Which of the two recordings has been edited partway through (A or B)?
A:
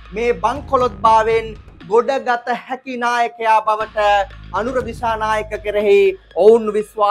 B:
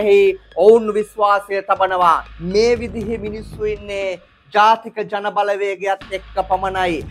B